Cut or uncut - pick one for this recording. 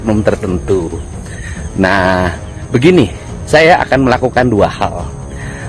uncut